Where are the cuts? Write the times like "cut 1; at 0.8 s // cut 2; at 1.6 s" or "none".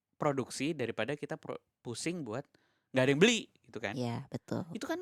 none